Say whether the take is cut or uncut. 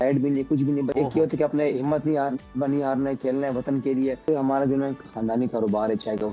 cut